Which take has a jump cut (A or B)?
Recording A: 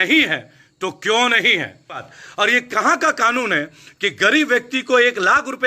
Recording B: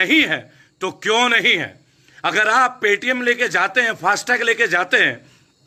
A